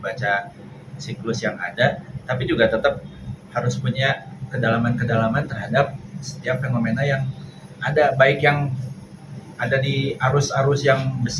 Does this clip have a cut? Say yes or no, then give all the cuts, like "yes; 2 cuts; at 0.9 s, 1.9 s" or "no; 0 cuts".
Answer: no; 0 cuts